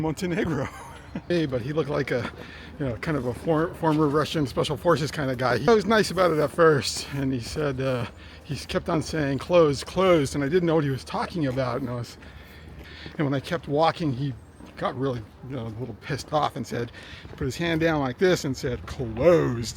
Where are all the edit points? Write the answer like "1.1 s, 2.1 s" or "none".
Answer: 1.3 s, 5.7 s, 12.8 s